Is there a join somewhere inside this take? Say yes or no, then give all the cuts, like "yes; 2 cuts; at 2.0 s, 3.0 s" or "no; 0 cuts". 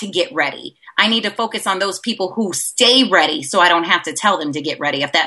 no; 0 cuts